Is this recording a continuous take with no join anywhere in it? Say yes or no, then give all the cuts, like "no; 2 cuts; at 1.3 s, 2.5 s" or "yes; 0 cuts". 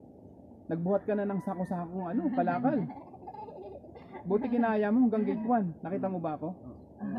yes; 0 cuts